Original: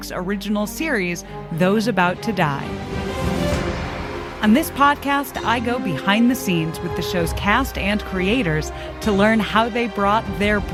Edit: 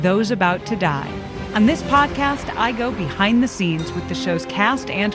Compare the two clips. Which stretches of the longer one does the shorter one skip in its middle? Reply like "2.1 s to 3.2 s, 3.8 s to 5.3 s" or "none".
2.9 s to 4.3 s

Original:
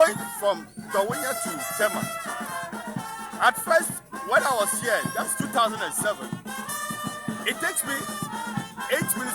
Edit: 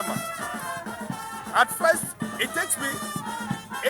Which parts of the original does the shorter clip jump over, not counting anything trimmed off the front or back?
4.0 s to 7.2 s

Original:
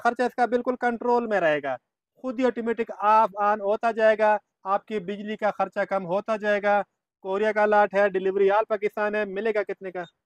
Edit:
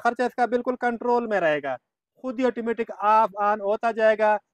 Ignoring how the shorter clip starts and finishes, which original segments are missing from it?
none

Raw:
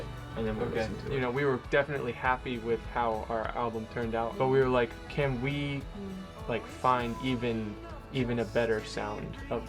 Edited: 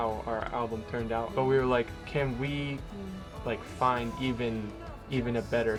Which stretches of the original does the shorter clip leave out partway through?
none

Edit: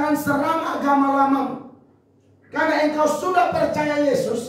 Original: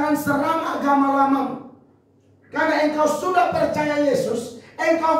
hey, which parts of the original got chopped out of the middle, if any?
none

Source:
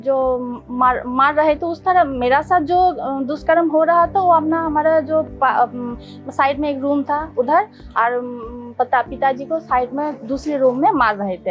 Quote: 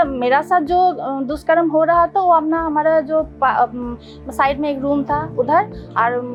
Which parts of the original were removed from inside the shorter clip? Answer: none

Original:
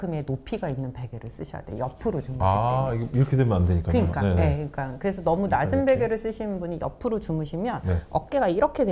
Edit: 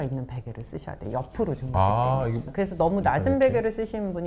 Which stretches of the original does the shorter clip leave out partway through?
3.1 s to 4.9 s

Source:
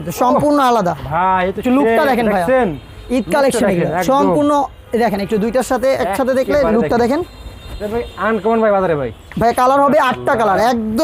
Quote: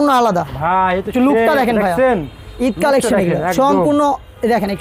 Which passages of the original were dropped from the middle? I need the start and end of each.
none

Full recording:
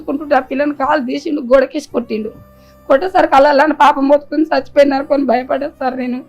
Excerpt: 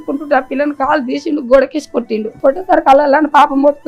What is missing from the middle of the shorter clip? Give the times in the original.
2.2 s to 2.7 s

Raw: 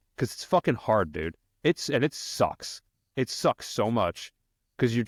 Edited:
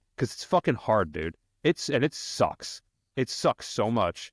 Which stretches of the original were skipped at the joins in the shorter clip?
none

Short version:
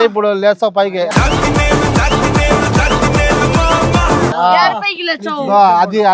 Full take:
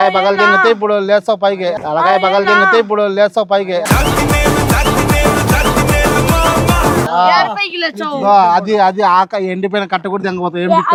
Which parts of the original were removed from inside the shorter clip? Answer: 1.6 s to 3.7 s

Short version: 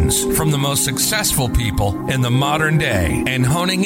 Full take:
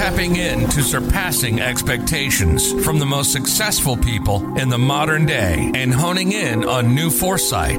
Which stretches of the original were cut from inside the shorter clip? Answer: none

